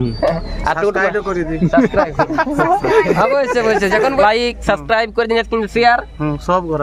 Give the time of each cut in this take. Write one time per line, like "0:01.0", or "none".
0:04.2

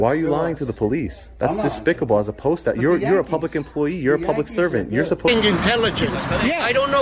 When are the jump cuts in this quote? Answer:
0:05.3

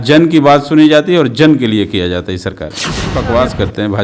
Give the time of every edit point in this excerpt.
0:02.9

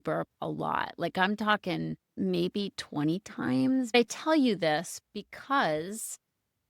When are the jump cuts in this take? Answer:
0:02.1
0:03.9

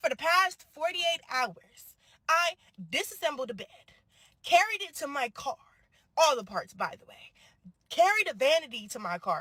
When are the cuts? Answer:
none

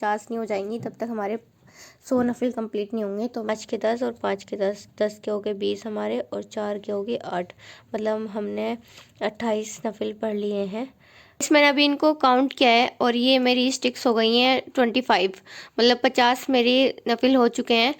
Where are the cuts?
0:03.5
0:11.4

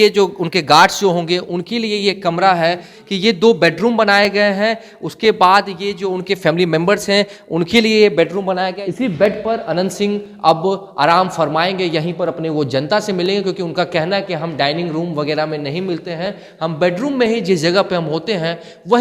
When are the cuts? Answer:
0:02.9
0:08.8

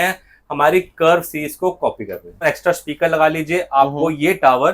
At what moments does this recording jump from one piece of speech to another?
0:02.4

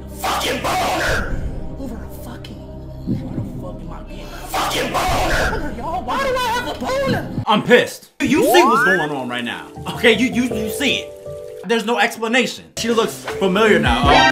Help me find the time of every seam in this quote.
0:07.4
0:08.2
0:12.8

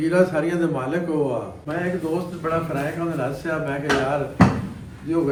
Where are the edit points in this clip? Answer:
none

